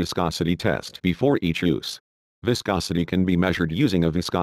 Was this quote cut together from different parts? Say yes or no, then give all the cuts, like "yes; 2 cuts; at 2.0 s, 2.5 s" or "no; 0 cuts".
yes; 1 cut; at 1.8 s